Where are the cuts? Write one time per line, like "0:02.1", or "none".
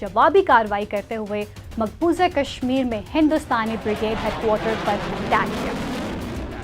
none